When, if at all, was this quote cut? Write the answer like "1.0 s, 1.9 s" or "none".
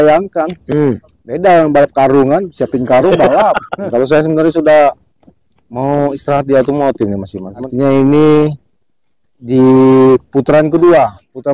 3.8 s, 7.6 s